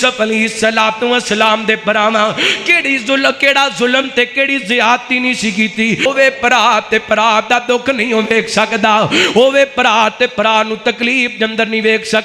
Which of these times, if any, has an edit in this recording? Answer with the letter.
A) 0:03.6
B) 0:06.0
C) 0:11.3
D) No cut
B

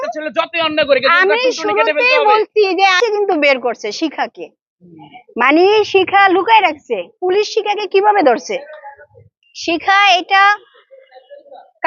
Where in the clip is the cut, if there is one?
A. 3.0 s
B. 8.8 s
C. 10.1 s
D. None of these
A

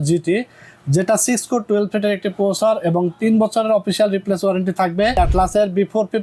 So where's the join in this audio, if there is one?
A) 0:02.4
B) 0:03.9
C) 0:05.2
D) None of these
C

